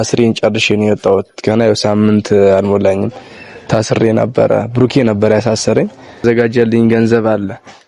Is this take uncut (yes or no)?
no